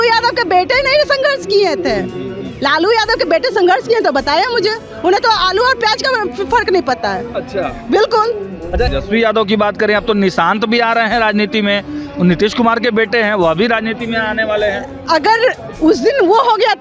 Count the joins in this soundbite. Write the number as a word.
one